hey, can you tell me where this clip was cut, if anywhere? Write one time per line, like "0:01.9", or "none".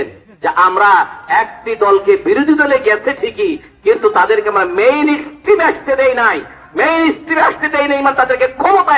none